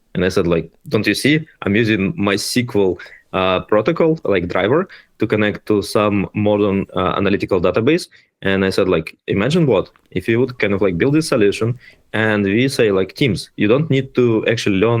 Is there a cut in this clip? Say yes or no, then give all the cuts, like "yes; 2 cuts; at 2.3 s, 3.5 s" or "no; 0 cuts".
no; 0 cuts